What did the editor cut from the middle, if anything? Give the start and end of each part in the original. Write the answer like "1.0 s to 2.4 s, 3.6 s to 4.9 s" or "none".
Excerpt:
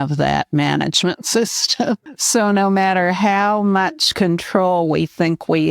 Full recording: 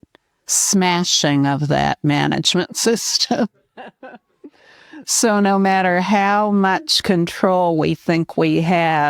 3.7 s to 5.0 s